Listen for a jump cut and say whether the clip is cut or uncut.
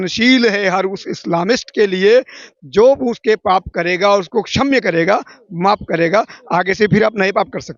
uncut